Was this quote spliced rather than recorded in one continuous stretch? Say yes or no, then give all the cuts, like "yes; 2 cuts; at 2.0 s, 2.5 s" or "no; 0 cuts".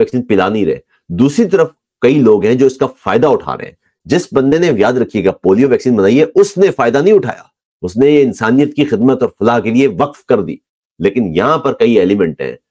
no; 0 cuts